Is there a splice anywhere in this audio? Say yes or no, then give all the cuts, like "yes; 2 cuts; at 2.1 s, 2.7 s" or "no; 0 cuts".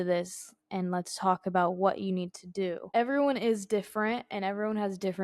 yes; 1 cut; at 2.8 s